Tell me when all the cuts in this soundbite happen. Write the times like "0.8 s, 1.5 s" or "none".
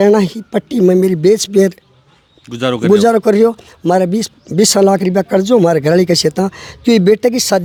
none